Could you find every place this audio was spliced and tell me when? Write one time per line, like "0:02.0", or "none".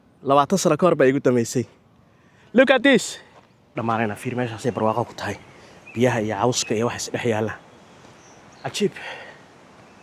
0:03.8